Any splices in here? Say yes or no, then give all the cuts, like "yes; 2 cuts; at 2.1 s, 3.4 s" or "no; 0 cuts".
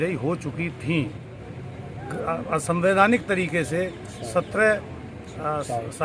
yes; 1 cut; at 1.2 s